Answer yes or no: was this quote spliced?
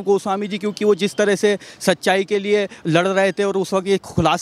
no